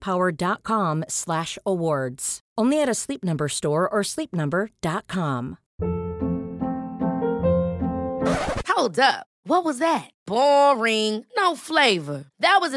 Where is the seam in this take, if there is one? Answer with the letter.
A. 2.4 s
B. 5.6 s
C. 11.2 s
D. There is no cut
B